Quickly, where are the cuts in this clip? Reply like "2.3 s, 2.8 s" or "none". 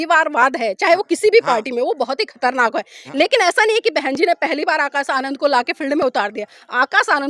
none